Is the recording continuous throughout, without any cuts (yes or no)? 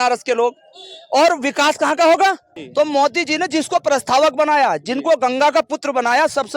no